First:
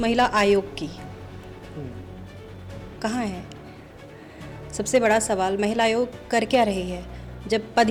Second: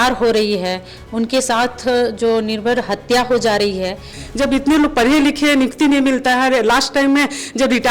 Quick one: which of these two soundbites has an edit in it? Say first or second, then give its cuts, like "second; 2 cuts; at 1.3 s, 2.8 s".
second; 1 cut; at 4.2 s